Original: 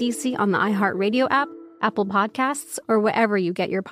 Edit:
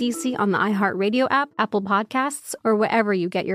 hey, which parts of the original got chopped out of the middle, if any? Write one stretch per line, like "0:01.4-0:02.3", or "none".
0:01.5-0:01.7